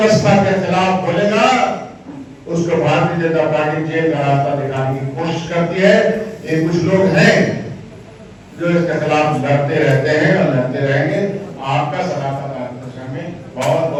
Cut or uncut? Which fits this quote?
uncut